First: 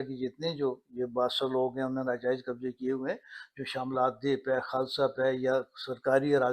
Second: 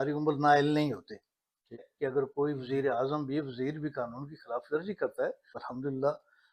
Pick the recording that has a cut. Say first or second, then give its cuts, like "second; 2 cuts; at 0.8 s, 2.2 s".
second; 2 cuts; at 1.9 s, 5.6 s